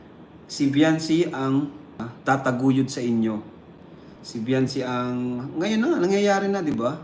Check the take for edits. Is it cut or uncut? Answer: cut